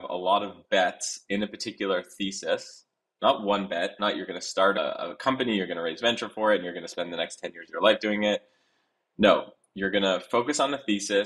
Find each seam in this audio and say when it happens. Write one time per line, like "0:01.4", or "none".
0:04.8